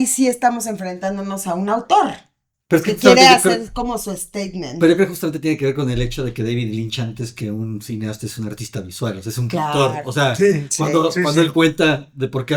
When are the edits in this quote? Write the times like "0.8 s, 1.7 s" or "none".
none